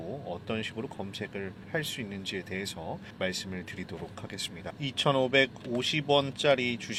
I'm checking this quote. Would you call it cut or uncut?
uncut